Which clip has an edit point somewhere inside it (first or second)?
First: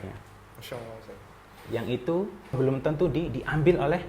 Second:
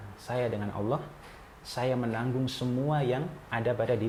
first